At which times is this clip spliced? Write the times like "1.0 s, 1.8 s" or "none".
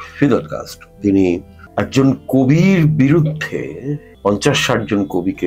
1.6 s, 4.1 s